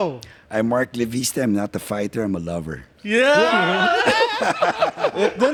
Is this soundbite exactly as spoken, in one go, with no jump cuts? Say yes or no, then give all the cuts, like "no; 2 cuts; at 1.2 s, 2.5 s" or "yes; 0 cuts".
yes; 0 cuts